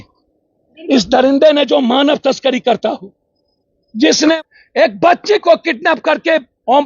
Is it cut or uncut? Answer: cut